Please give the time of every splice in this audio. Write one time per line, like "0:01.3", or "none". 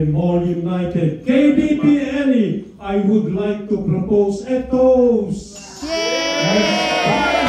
none